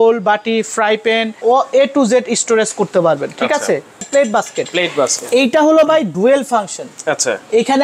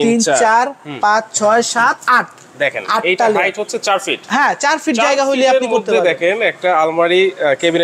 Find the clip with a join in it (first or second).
first